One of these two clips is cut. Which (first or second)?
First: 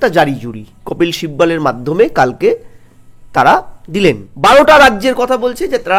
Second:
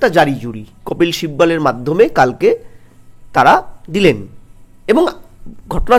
first